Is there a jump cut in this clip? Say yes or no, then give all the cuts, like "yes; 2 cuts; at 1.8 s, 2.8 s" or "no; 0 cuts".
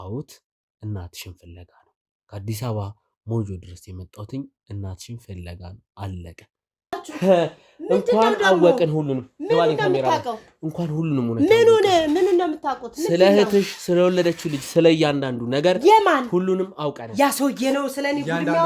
yes; 1 cut; at 7.0 s